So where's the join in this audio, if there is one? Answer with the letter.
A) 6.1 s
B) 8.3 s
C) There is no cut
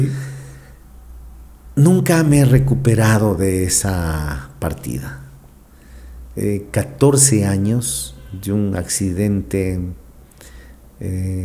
C